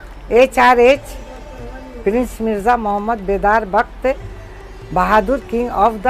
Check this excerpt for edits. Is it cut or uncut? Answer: uncut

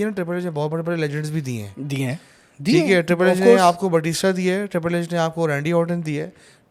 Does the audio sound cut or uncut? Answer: uncut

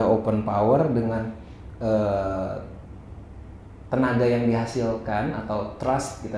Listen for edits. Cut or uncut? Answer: uncut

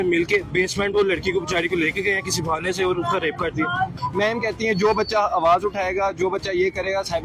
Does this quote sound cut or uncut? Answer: cut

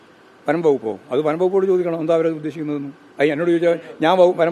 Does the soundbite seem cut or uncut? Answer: uncut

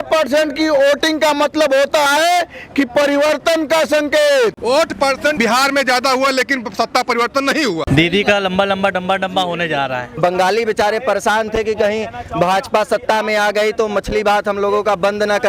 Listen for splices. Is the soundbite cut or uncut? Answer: cut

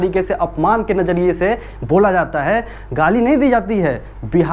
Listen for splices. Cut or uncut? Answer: uncut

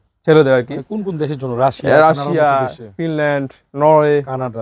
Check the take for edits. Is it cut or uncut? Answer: uncut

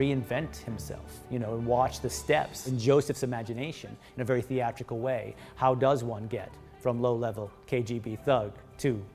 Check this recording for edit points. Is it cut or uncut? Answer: cut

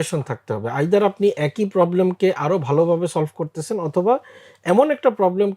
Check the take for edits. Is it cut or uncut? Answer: uncut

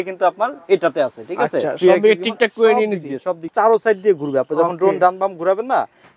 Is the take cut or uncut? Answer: cut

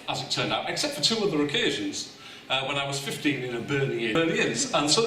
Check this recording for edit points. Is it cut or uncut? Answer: cut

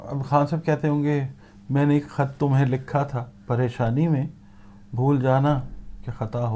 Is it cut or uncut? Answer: uncut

